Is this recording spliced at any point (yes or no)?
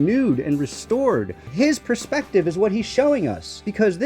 yes